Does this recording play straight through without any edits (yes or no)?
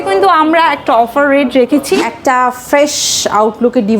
no